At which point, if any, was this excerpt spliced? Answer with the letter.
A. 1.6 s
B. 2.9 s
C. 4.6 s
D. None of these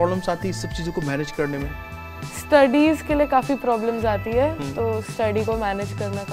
D